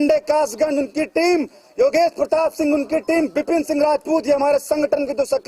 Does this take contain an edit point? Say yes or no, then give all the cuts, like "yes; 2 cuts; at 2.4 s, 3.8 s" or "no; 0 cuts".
yes; 1 cut; at 1.7 s